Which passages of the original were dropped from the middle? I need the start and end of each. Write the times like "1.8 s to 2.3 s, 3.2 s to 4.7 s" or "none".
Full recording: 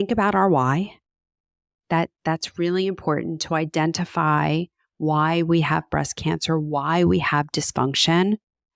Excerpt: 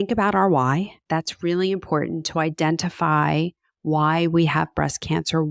1.0 s to 2.1 s

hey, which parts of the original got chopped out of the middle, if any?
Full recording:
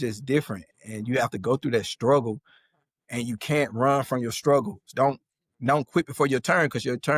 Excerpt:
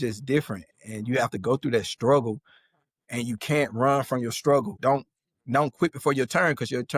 4.7 s to 4.9 s

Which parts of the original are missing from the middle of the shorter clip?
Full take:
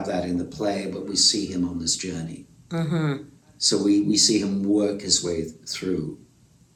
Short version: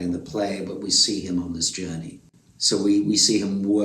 2.6 s to 3.3 s

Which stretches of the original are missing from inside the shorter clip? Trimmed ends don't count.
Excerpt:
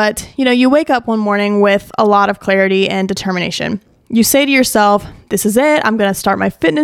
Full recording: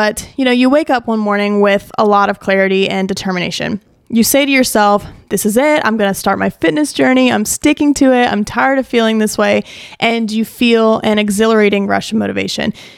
none

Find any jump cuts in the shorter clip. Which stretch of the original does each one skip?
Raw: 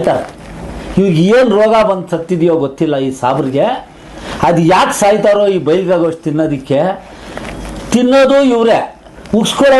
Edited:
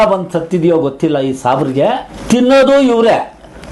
3.9 s to 7.7 s

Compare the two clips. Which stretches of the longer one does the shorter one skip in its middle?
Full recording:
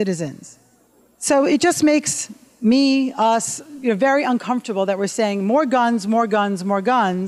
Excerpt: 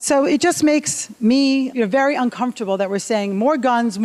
2.2 s to 2.4 s, 3.1 s to 3.8 s

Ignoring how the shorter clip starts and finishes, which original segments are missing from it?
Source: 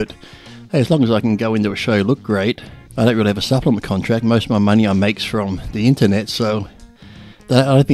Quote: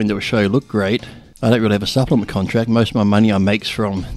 none

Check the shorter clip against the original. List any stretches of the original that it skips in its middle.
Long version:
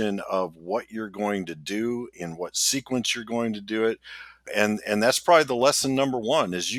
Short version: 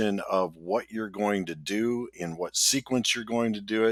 none

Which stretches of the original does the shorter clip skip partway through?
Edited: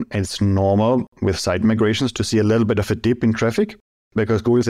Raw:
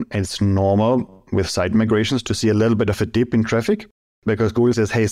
1.1 s to 1.2 s

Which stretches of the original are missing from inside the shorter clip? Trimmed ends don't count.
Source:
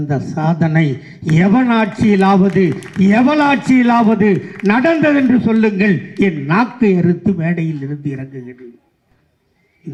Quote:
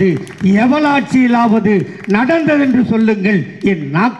none

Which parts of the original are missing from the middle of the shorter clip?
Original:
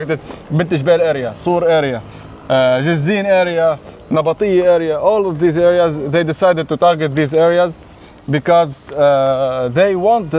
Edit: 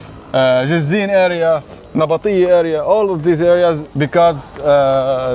6.0 s to 8.2 s

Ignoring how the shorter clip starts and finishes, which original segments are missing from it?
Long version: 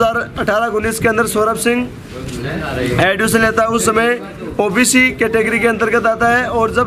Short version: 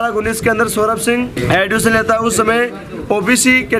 2.0 s to 2.9 s

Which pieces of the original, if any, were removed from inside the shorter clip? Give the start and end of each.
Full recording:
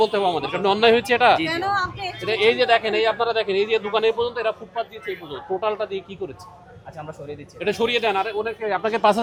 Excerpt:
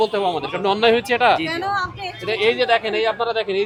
none

